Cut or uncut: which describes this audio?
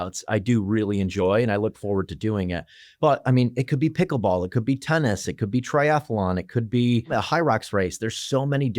cut